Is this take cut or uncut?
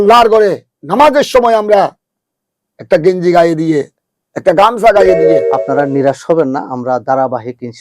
cut